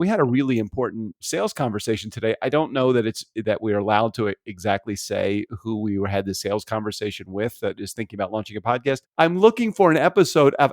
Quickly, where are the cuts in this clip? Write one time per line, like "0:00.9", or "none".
0:01.2
0:09.1

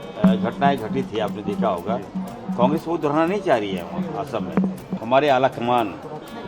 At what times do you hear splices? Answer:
0:04.9

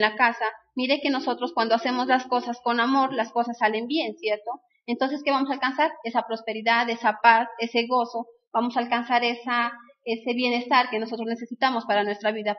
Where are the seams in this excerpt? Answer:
0:06.6

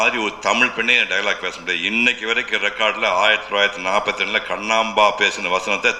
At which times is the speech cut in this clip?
none

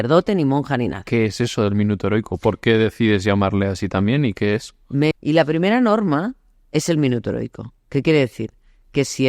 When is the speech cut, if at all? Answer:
0:01.0
0:05.1

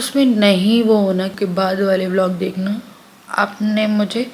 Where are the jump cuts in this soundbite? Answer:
0:01.3

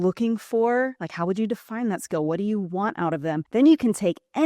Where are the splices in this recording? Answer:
0:03.4

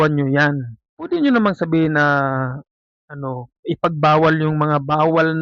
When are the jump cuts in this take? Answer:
0:00.9

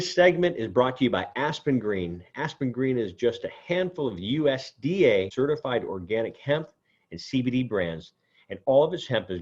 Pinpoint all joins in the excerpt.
0:05.3

